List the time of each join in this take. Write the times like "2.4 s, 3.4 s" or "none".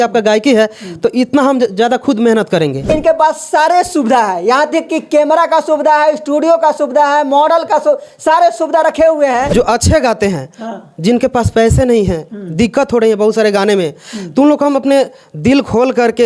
2.9 s, 9.5 s